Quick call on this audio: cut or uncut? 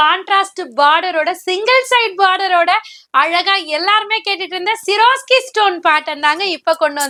uncut